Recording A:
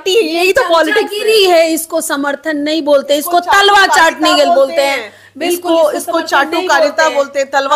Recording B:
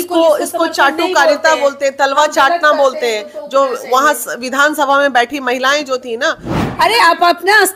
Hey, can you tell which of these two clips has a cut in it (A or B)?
B